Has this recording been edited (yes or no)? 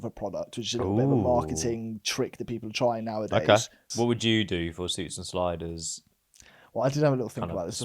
yes